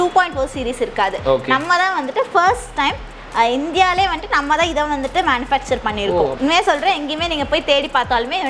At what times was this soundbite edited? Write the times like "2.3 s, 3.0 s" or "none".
6.3 s